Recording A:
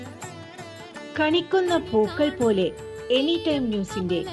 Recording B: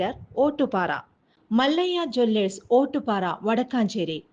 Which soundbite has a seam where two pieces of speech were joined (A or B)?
A